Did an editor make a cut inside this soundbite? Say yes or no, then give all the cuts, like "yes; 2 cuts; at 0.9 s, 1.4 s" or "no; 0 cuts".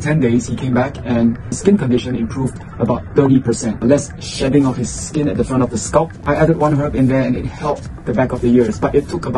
yes; 3 cuts; at 1.6 s, 3.8 s, 6.2 s